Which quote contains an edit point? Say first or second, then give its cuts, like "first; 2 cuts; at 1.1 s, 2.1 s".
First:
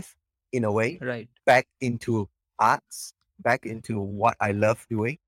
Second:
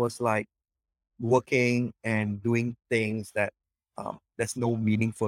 second; 1 cut; at 4.1 s